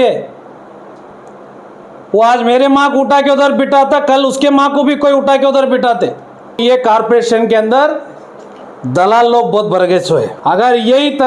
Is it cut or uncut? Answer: cut